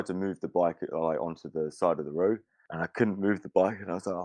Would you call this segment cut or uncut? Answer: uncut